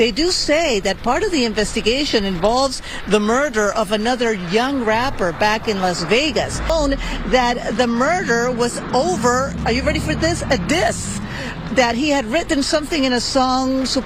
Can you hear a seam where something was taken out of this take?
no; 0 cuts

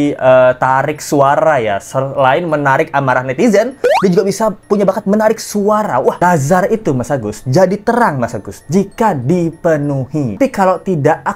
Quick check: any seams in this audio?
yes; 2 cuts; at 6.2 s, 10.4 s

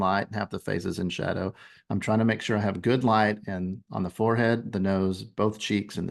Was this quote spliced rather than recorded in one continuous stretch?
no; 0 cuts

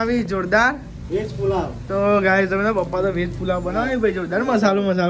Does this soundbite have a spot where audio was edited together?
no; 0 cuts

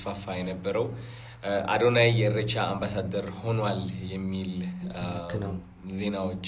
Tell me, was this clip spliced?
no; 0 cuts

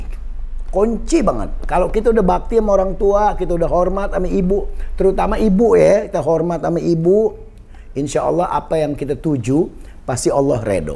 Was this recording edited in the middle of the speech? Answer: no; 0 cuts

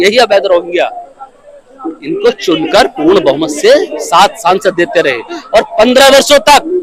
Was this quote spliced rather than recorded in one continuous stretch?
no; 0 cuts

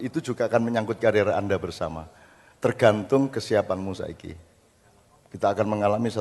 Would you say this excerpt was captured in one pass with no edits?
yes; 0 cuts

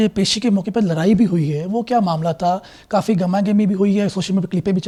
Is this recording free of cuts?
yes; 0 cuts

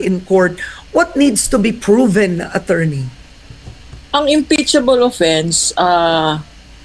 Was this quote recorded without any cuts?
yes; 0 cuts

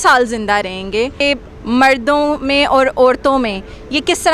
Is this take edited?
yes; 1 cut; at 1.2 s

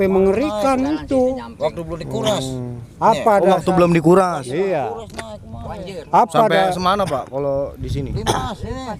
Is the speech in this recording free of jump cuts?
yes; 0 cuts

